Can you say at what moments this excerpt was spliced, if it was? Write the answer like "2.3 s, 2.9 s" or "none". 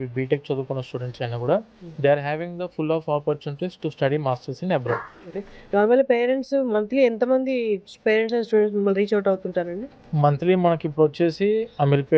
5.3 s